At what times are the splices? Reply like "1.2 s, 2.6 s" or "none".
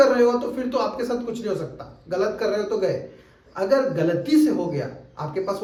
none